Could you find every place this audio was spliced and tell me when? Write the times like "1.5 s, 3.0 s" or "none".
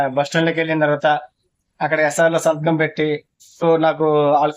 3.6 s